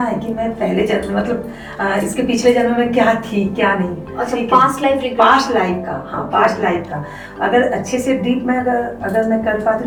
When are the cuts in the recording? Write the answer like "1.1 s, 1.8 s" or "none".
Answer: none